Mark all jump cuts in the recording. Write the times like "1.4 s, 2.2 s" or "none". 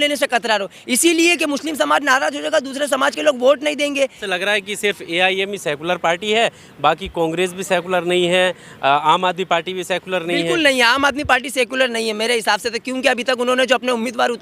4.2 s